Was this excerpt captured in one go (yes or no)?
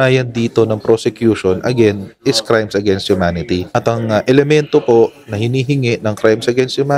no